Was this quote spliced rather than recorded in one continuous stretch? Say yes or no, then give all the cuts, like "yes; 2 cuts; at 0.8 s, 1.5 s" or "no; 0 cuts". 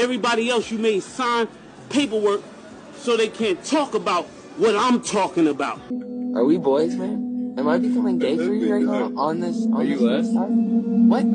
yes; 1 cut; at 5.8 s